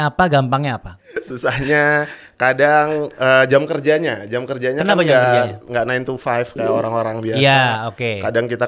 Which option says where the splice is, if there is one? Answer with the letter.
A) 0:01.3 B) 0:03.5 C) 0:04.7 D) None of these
A